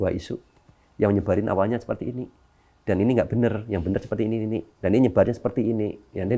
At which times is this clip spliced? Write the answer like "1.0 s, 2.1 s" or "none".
none